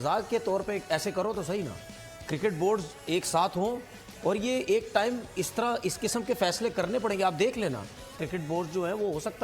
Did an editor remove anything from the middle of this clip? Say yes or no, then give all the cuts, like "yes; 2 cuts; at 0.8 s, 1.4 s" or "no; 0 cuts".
yes; 1 cut; at 8.1 s